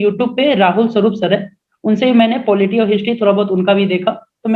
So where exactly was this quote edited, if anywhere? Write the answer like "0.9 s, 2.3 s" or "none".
none

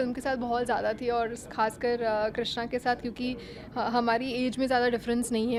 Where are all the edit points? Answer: none

